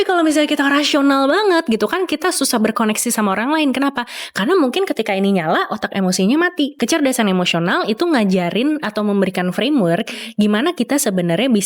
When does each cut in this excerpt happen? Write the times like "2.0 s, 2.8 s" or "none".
6.7 s